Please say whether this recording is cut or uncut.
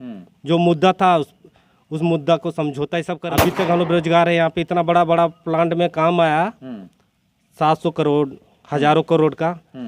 cut